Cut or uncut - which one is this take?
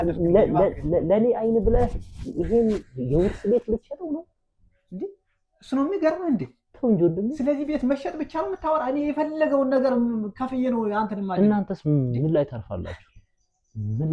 uncut